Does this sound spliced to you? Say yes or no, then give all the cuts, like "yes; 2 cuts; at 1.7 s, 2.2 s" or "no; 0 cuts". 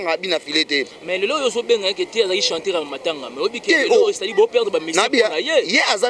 no; 0 cuts